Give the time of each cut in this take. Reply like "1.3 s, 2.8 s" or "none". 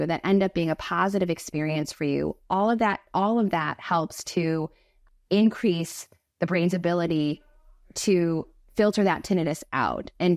none

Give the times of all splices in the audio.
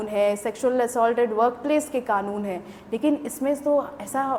none

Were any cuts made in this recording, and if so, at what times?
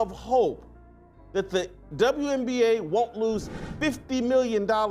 none

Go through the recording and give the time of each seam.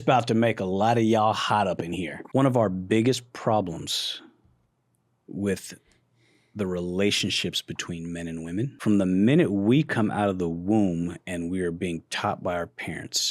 2.1 s, 8.8 s

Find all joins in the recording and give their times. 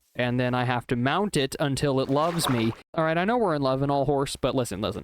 2.9 s

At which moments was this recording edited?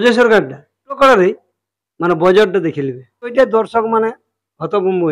1.0 s, 3.3 s

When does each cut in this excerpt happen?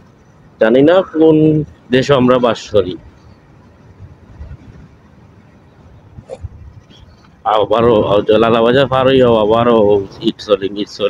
6.5 s

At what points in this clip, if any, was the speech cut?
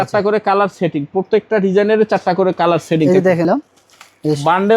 3.5 s

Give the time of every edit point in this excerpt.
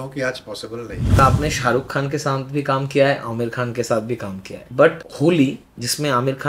1.2 s, 5.1 s

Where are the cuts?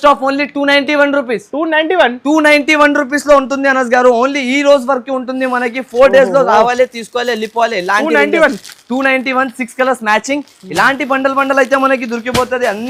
none

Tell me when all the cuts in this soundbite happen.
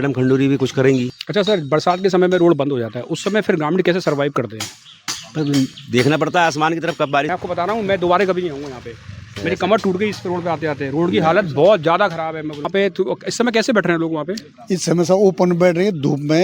1.2 s, 7.3 s, 12.7 s

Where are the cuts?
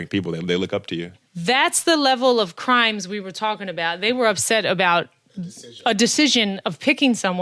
1.1 s

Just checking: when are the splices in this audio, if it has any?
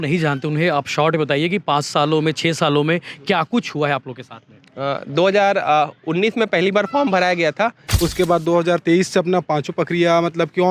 7.9 s

